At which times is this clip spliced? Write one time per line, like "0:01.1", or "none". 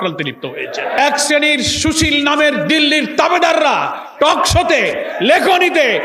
0:01.0

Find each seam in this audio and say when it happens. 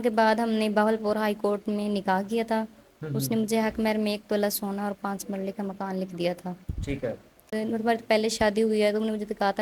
0:07.6

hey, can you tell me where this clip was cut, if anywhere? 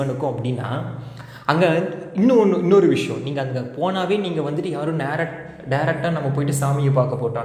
none

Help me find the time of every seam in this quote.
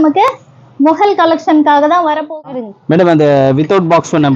0:02.2

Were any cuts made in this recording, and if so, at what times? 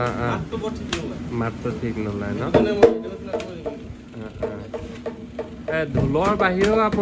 none

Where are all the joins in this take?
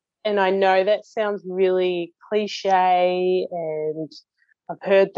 none

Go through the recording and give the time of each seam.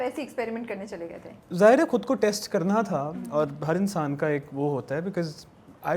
none

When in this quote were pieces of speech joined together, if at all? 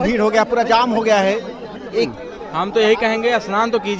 0:02.2

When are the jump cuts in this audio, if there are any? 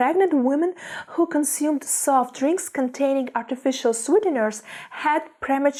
none

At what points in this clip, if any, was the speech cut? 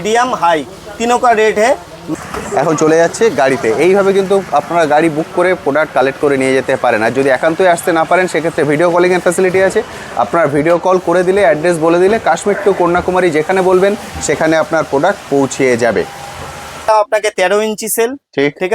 0:02.1
0:16.9

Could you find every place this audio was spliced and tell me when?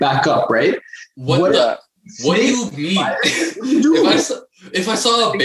none

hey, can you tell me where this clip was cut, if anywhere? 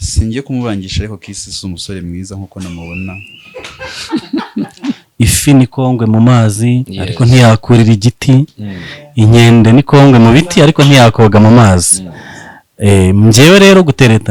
0:05.0

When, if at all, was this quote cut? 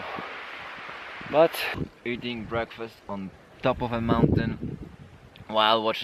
0:01.7

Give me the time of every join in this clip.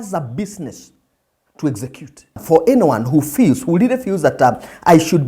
0:02.4

